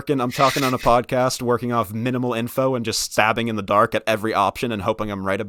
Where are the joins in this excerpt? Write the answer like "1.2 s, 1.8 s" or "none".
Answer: none